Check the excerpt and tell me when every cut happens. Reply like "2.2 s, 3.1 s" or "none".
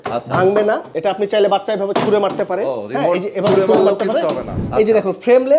0.9 s, 4.6 s